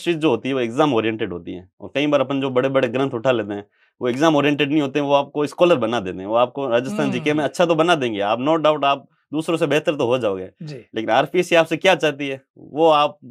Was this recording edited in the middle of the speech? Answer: no; 0 cuts

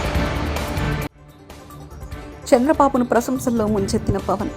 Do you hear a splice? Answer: yes; 1 cut; at 1.3 s

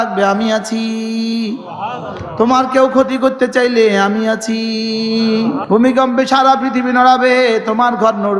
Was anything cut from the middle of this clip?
yes; 1 cut; at 5.6 s

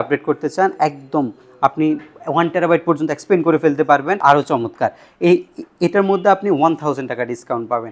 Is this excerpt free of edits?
no; 1 cut; at 4.2 s

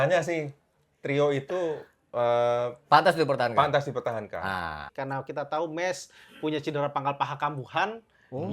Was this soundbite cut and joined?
yes; 1 cut; at 4.9 s

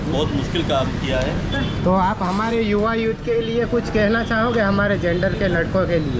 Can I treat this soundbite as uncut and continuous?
yes; 0 cuts

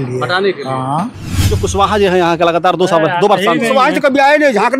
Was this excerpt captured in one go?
no; 1 cut; at 1.4 s

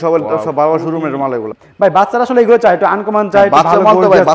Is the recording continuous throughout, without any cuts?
no; 1 cut; at 1.6 s

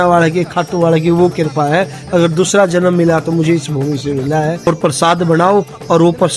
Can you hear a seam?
yes; 1 cut; at 4.7 s

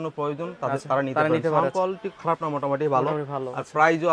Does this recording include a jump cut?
no; 0 cuts

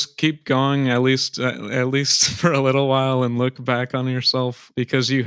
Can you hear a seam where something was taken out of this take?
no; 0 cuts

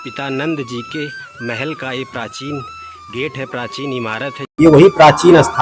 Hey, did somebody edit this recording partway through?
yes; 1 cut; at 4.5 s

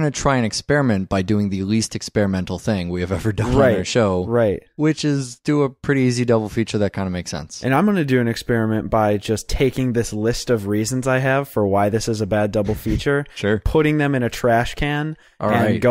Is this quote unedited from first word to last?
no; 1 cut; at 14.7 s

